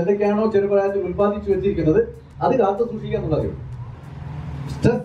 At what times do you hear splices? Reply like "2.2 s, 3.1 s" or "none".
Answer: 3.9 s